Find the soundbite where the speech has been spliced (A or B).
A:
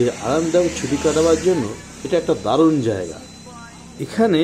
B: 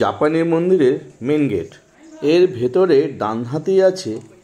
B